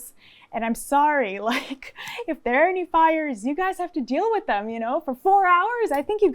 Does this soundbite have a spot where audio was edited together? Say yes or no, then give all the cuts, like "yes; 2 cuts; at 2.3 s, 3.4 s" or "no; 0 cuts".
no; 0 cuts